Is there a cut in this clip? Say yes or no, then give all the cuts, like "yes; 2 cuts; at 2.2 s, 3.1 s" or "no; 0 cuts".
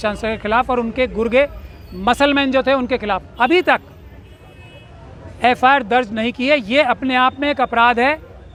no; 0 cuts